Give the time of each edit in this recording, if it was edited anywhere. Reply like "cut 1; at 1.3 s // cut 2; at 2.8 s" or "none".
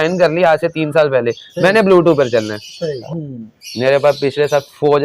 cut 1; at 3.0 s